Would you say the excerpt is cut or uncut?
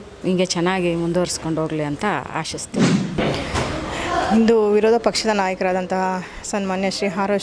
uncut